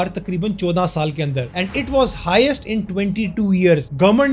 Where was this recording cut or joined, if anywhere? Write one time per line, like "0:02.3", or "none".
none